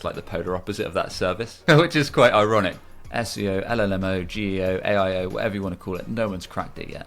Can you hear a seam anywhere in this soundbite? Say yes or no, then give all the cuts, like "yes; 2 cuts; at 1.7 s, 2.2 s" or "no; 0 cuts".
yes; 2 cuts; at 1.5 s, 2.8 s